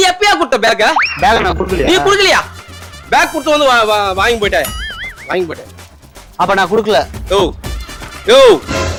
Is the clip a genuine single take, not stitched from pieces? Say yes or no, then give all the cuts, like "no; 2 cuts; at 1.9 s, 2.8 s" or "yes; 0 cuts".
yes; 0 cuts